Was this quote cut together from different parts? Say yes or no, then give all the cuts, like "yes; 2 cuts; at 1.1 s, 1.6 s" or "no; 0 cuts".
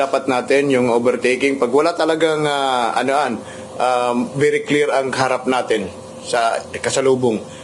no; 0 cuts